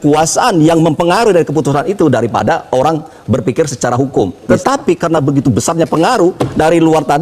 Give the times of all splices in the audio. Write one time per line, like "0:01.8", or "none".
0:04.5

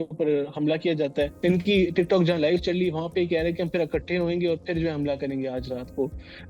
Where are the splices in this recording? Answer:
0:01.3

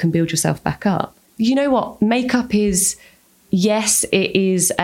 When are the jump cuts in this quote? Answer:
0:01.2

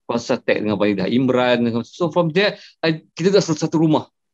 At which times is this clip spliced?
none

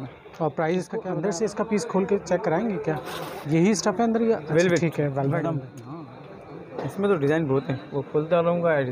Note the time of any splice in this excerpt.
0:01.1
0:05.8

